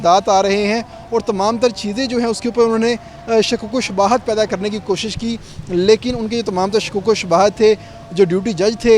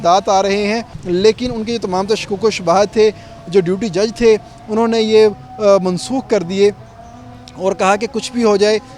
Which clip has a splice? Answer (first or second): second